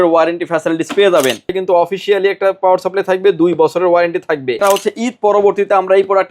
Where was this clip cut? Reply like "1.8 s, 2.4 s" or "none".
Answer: 1.5 s, 4.6 s